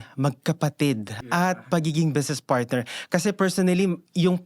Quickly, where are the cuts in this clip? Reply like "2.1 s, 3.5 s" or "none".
1.2 s